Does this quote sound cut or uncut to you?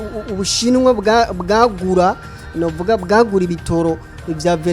uncut